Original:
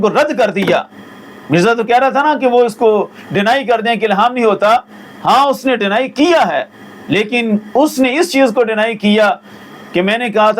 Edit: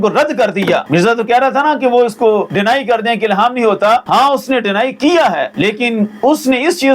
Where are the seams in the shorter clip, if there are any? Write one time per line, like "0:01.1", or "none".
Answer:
0:00.9
0:02.5
0:04.0
0:05.5